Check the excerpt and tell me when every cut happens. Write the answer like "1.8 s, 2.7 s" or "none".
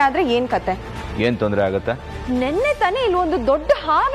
2.1 s